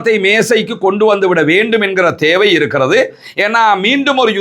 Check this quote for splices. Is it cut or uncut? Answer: uncut